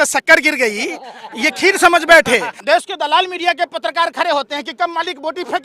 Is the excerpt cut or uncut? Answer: cut